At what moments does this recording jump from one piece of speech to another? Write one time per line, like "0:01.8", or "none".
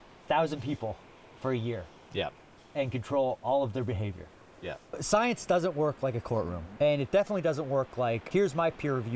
0:04.9
0:06.6
0:08.2